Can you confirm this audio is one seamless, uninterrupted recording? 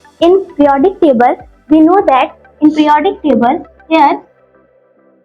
yes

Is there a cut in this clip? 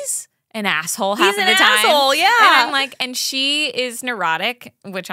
no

